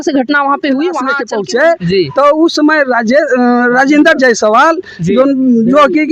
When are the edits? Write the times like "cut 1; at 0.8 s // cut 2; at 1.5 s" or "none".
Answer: cut 1; at 1.3 s